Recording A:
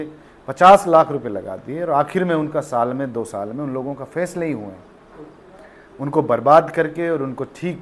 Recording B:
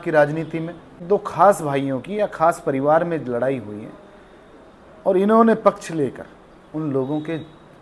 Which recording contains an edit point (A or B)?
B